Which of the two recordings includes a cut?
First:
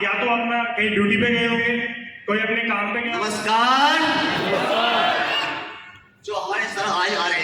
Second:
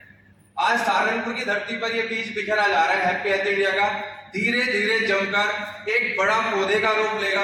first; 1 cut; at 3.1 s

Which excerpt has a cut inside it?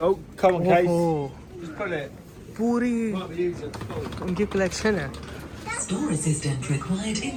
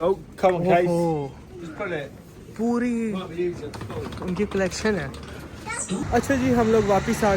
second; 1 cut; at 6.0 s

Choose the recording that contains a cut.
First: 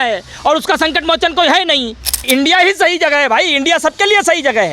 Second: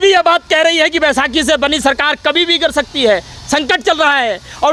first; 1 cut; at 2.2 s

